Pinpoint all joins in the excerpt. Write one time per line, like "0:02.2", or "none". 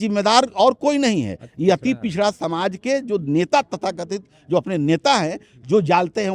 none